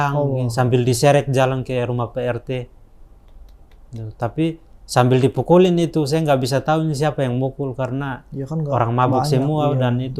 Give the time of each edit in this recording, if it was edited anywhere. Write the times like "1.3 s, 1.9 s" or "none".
none